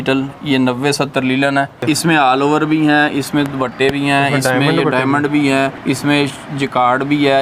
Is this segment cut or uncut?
cut